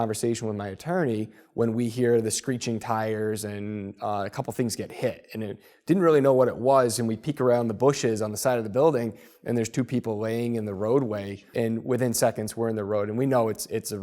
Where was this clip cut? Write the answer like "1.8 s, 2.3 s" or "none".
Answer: 11.4 s